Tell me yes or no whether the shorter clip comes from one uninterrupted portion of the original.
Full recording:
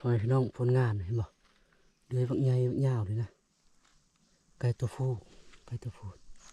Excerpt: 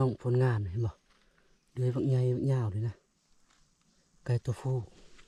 yes